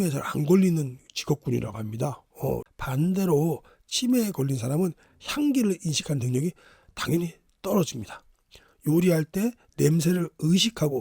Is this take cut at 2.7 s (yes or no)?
yes